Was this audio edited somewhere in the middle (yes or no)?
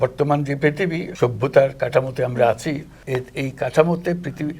yes